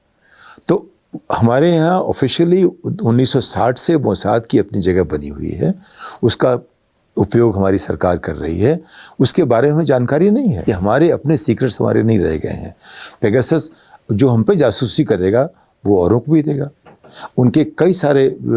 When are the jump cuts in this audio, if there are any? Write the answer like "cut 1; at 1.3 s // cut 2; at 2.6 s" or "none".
cut 1; at 10.6 s